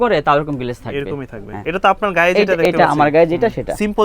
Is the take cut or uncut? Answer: cut